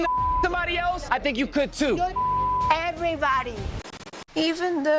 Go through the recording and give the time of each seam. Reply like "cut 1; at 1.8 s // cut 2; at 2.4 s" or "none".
cut 1; at 4.0 s